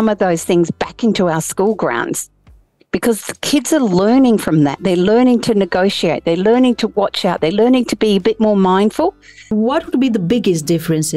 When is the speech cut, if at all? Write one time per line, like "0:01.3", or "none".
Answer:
0:09.5